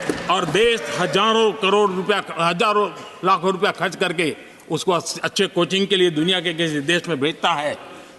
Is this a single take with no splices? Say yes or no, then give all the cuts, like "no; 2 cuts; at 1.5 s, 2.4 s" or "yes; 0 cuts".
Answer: yes; 0 cuts